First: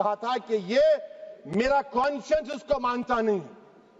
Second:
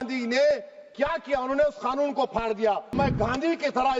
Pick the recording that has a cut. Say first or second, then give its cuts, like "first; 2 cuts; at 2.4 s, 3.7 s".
second; 1 cut; at 2.9 s